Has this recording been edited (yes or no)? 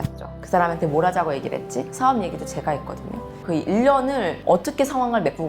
yes